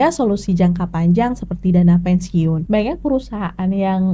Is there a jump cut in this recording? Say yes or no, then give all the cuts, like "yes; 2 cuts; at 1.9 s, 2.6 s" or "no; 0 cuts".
yes; 1 cut; at 2.6 s